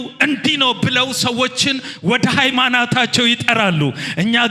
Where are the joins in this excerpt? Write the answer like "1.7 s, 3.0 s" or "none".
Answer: none